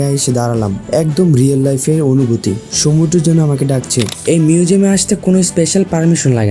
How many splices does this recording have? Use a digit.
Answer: 1